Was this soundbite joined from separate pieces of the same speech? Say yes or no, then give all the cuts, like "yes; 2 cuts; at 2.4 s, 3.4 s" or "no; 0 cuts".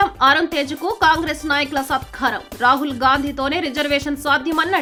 no; 0 cuts